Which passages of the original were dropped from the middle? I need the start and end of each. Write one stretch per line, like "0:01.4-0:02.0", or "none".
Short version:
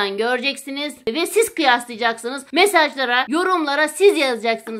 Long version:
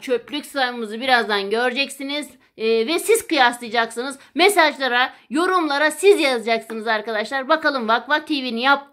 0:02.4-0:02.8
0:04.1-0:04.2
0:05.1-0:05.3